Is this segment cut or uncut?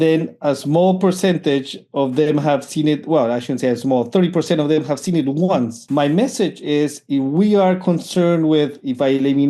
cut